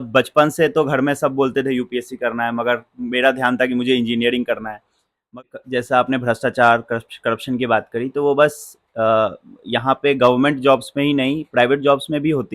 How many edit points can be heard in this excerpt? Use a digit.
1